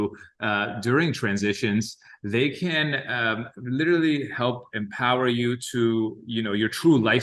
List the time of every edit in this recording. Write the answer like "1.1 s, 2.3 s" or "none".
none

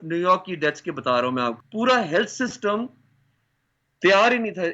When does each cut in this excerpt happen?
1.6 s

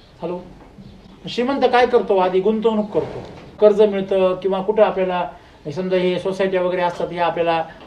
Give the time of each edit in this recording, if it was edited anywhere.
3.5 s

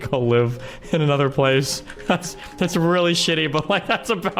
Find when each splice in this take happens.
none

